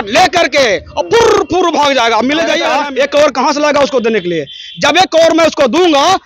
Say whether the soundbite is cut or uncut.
cut